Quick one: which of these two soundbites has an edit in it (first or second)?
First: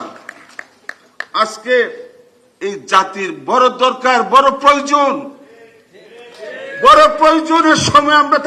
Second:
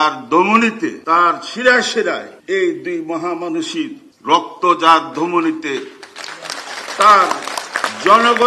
second